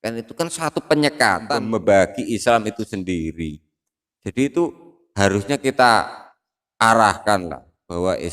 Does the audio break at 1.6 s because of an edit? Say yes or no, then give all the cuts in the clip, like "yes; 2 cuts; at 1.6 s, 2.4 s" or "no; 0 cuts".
yes; 1 cut; at 1.6 s